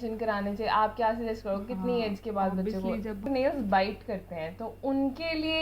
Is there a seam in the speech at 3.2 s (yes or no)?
yes